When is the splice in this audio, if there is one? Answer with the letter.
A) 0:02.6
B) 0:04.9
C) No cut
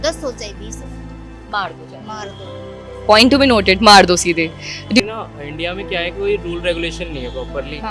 B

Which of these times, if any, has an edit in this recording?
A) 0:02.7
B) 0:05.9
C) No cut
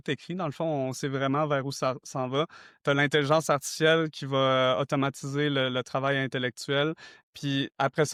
C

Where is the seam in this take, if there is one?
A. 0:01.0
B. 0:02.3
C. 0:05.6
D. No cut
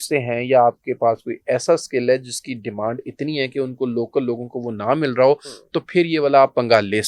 D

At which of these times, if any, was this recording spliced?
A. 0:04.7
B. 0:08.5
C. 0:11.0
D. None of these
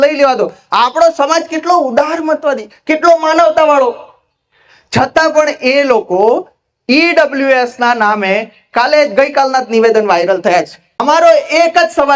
C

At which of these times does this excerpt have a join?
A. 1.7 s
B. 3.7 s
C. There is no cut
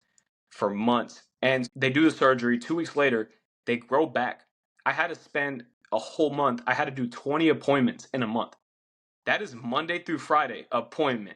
A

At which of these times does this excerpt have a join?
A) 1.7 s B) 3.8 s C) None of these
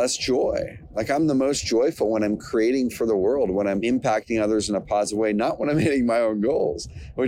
B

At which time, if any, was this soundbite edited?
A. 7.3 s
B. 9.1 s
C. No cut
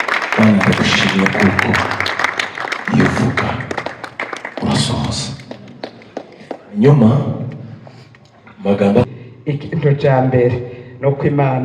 B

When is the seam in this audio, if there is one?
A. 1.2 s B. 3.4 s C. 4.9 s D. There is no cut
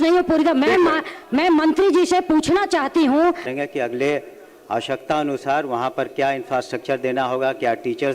B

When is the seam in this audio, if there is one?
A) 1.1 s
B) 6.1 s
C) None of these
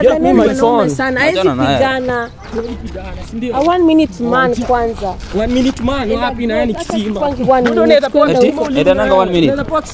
C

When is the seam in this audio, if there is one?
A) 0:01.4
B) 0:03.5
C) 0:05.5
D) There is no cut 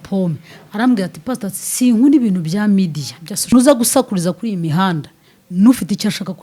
B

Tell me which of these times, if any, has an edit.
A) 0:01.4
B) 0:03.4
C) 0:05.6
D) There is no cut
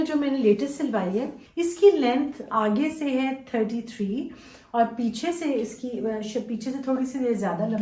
A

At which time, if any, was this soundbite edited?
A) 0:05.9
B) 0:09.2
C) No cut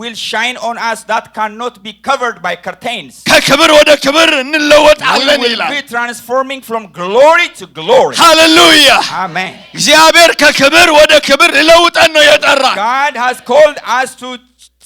C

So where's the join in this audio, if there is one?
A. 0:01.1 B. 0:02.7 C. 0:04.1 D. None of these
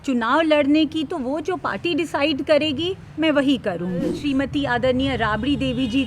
C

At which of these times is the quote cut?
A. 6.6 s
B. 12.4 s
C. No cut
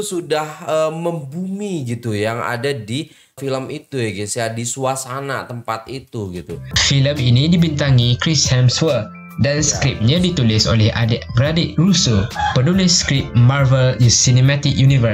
A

